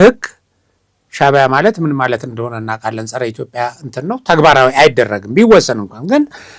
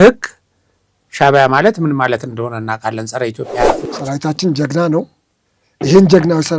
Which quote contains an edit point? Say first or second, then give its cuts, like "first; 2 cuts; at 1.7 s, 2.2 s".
second; 1 cut; at 3.8 s